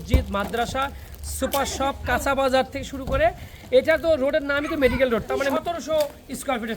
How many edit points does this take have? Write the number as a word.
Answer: one